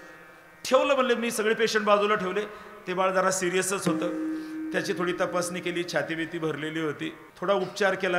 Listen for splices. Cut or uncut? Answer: cut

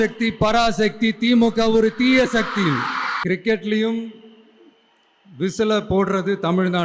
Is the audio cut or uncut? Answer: cut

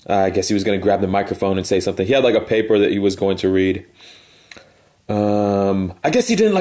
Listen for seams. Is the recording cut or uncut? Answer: cut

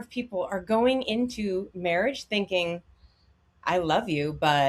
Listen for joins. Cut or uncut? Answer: uncut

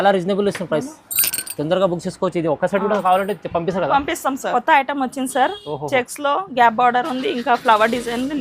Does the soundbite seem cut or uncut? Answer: cut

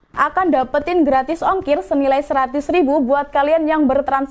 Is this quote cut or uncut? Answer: uncut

